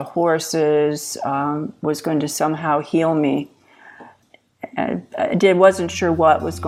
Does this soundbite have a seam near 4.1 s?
yes; 1 cut; at 4.1 s

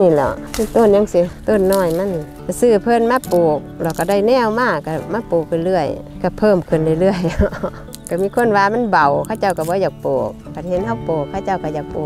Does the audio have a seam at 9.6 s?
no; 1 cut; at 7.8 s

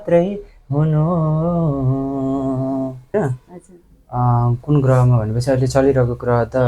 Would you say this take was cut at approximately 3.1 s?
yes; 1 cut; at 3.1 s

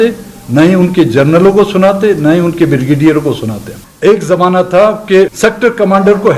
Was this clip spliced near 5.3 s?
yes; 2 cuts; at 3.8 s, 5.3 s

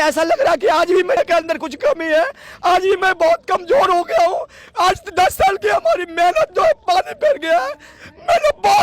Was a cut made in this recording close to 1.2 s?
yes; 1 cut; at 1.2 s

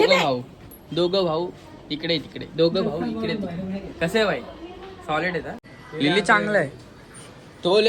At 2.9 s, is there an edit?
no; 1 cut; at 5.6 s

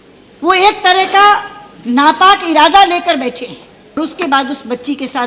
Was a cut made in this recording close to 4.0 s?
yes; 1 cut; at 4.0 s

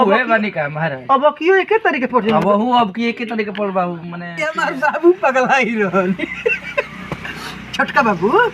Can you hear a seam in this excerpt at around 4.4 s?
yes; 1 cut; at 4.4 s

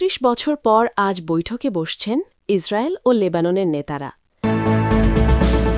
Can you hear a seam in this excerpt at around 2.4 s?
no; 1 cut; at 4.3 s

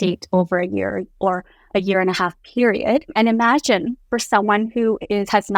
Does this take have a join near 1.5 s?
no; 1 cut; at 3.1 s

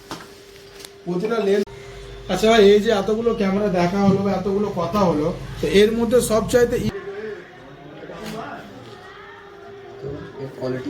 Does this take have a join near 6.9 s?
yes; 2 cuts; at 1.7 s, 6.9 s

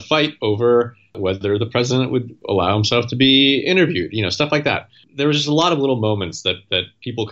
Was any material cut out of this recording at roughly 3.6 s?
no; 3 cuts; at 1.1 s, 2.4 s, 5.0 s

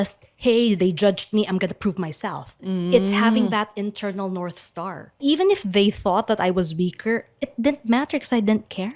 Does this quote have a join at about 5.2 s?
yes; 1 cut; at 5.2 s

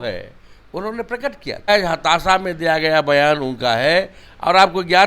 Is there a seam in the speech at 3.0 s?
no; 1 cut; at 1.7 s

